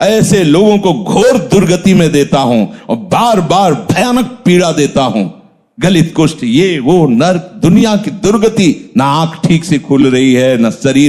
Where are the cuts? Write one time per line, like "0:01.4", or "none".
none